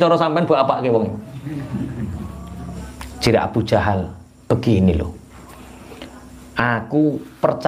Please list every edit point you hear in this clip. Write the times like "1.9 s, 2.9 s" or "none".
2.8 s

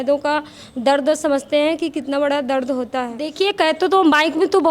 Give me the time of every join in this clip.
3.2 s

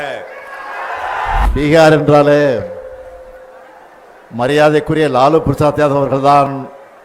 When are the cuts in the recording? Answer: 1.5 s

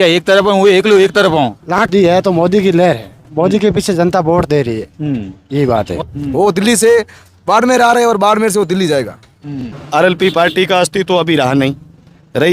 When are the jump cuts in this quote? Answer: 1.9 s, 6.1 s, 9.7 s

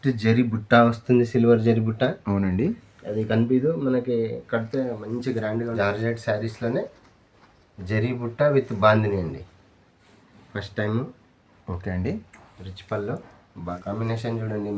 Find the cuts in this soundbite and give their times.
5.8 s, 13.8 s

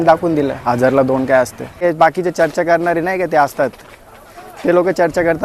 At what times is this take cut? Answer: 1.8 s

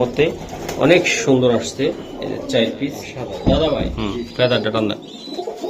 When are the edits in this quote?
3.9 s

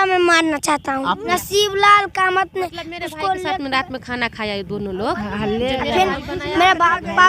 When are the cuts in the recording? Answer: 1.2 s

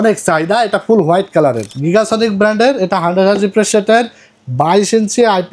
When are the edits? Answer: 1.7 s

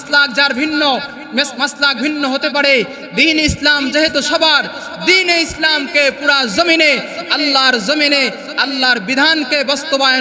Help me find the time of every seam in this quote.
none

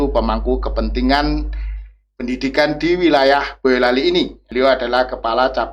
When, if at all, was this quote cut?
4.4 s

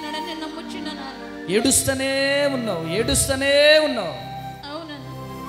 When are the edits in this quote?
none

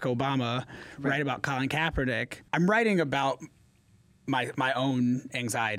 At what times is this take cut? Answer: 2.3 s

